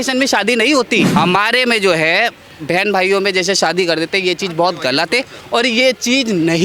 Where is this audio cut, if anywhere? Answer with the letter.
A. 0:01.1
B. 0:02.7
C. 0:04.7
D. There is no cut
A